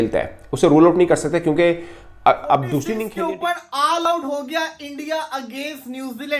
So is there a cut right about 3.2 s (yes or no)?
yes